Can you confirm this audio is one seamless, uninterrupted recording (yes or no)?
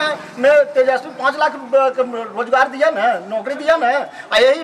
yes